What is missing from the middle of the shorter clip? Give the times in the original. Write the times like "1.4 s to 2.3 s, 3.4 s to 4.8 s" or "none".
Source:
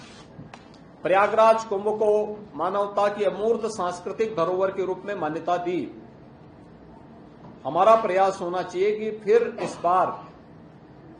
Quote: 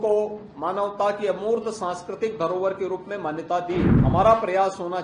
5.9 s to 7.6 s